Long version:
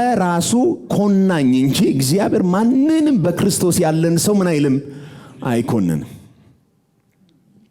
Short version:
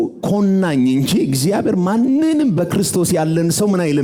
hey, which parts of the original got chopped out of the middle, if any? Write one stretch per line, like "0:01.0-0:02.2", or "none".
none